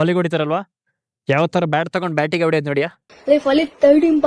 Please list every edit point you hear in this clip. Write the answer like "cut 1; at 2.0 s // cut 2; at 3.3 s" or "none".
cut 1; at 3.0 s

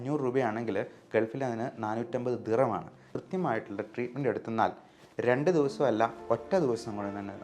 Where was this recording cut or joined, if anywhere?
cut 1; at 3.0 s

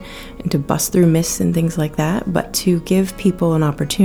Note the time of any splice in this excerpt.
none

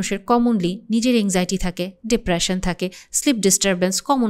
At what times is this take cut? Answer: none

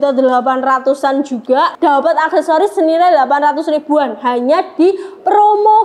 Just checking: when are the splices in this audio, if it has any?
cut 1; at 1.7 s

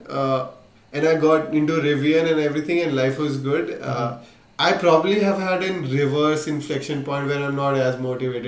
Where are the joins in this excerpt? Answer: none

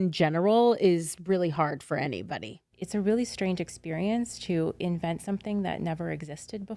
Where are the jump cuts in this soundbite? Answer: cut 1; at 2.6 s

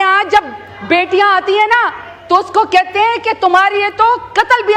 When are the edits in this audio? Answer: none

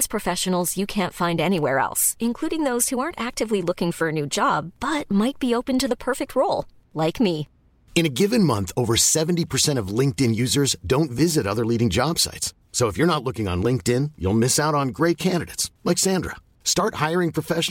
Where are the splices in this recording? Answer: none

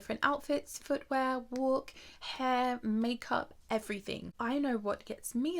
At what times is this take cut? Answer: cut 1; at 4.3 s

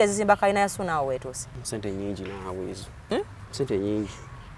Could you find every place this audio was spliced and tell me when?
cut 1; at 1.5 s // cut 2; at 3.1 s

